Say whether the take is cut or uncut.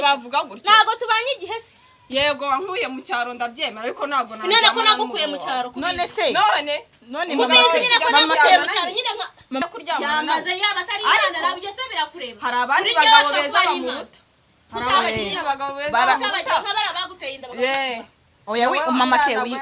cut